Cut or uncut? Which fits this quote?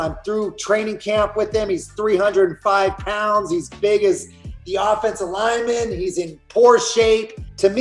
uncut